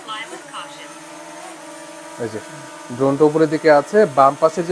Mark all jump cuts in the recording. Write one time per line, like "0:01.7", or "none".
none

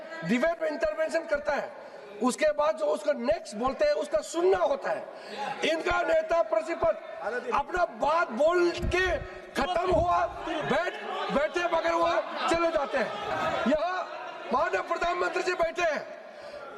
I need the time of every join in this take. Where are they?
0:13.3

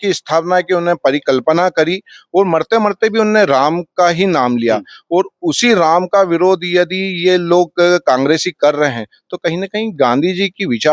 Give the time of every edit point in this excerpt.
none

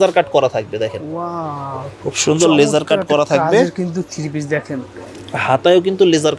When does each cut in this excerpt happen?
none

